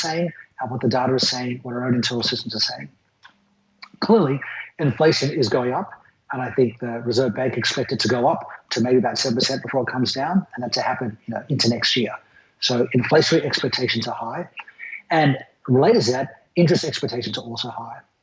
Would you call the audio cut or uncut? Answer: uncut